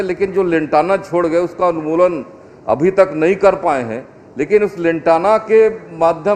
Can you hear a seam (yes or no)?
no